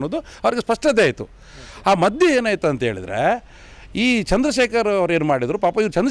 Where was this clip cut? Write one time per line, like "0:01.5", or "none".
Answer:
none